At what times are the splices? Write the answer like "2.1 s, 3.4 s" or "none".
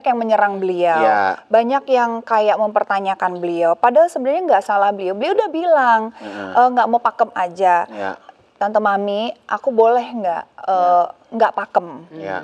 none